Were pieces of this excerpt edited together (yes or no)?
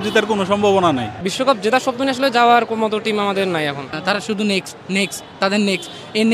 yes